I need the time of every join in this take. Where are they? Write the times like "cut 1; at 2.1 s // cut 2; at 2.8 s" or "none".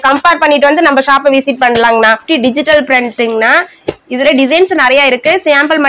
cut 1; at 2.2 s